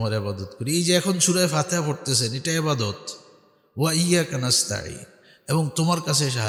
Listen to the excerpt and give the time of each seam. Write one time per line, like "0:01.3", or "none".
none